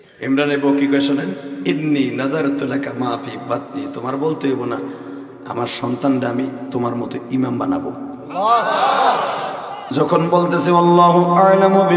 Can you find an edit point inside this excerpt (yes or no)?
yes